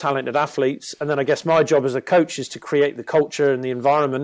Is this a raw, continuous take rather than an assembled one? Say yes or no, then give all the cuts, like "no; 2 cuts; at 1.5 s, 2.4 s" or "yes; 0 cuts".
yes; 0 cuts